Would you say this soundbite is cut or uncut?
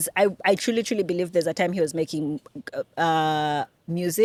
uncut